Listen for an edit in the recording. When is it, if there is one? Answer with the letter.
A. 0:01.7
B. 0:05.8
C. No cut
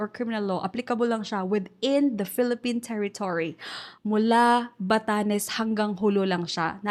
C